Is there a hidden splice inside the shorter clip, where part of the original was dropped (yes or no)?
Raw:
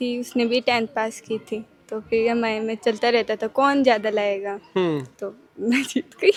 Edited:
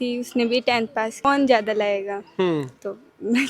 yes